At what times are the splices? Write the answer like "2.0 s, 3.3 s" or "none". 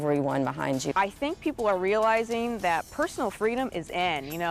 0.9 s